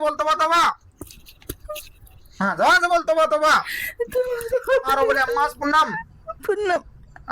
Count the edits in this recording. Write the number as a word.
one